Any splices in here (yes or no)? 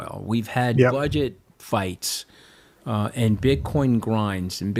no